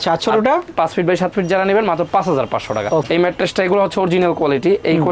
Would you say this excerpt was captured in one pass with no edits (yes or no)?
no